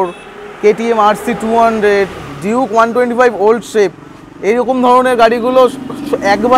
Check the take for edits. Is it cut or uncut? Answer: uncut